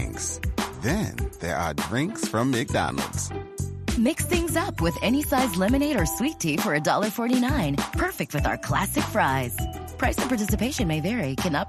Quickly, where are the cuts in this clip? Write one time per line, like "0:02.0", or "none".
none

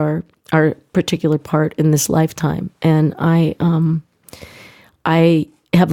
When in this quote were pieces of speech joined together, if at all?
none

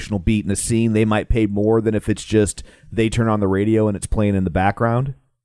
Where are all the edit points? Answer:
none

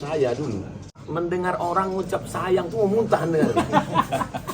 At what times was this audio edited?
0:00.9

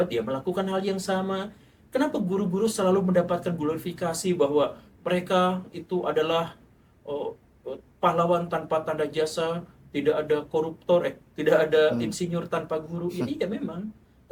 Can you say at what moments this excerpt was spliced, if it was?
none

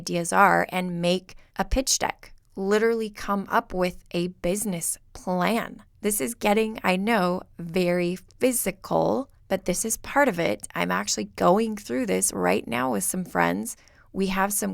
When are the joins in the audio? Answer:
0:01.4
0:05.8
0:09.3

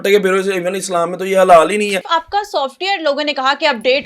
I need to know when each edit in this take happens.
0:02.0

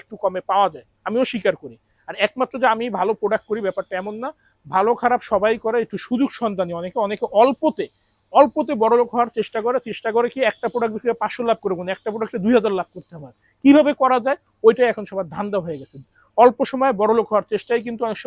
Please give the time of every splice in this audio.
none

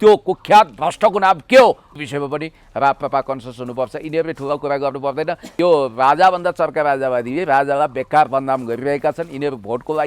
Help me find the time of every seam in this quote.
0:01.9
0:05.5

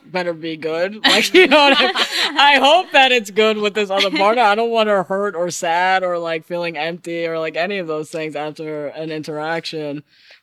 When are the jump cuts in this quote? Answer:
none

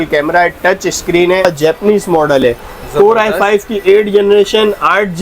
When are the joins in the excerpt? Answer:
0:01.4

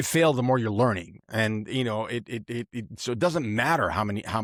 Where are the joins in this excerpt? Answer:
none

